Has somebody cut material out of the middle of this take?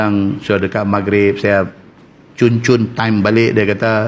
no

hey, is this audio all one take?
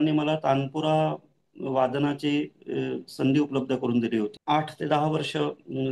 no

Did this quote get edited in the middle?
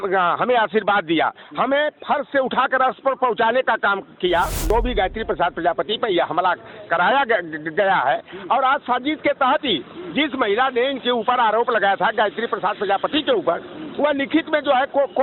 yes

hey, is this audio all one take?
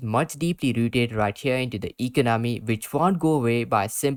yes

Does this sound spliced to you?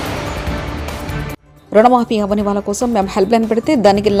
no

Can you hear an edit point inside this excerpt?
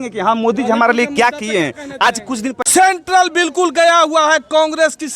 yes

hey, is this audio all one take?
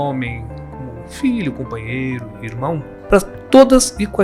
no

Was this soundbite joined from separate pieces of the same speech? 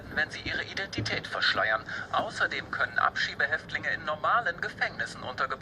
yes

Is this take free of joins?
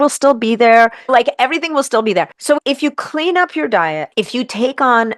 no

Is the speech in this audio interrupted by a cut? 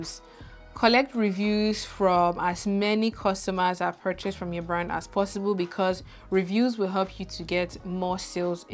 no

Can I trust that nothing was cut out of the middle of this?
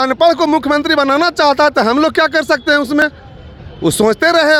yes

